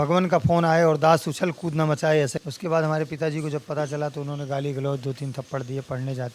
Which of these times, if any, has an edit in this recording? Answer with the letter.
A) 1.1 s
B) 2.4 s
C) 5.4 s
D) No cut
B